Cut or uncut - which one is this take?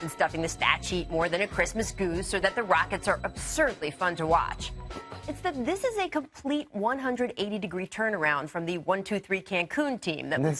cut